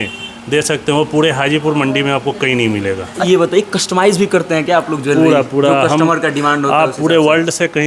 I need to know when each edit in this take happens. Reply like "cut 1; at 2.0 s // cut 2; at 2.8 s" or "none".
cut 1; at 3.2 s